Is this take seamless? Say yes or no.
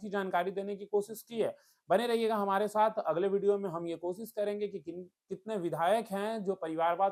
yes